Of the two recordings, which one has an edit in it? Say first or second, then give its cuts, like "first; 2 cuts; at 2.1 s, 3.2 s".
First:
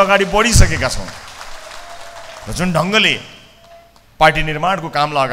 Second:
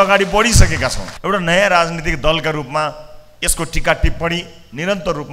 second; 1 cut; at 1.1 s